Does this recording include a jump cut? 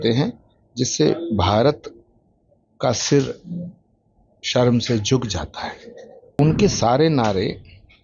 yes; 1 cut; at 6.4 s

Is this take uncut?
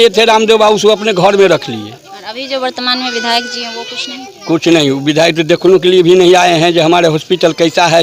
yes; 0 cuts

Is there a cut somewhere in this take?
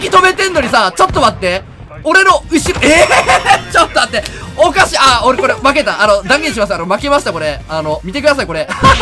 no; 0 cuts

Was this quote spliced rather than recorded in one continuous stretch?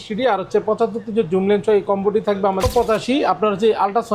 yes; 1 cut; at 2.6 s

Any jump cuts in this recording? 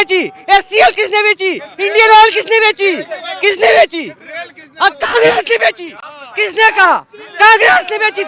no; 0 cuts

